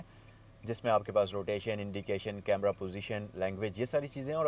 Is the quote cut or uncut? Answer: uncut